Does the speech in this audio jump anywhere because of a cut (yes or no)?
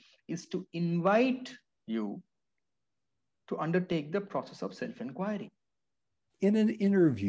yes